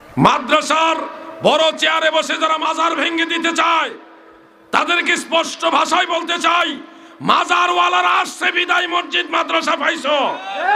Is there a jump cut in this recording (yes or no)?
no